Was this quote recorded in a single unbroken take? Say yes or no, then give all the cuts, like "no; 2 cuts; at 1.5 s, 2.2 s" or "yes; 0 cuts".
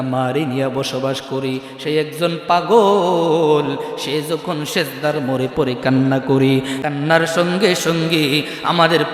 no; 1 cut; at 6.8 s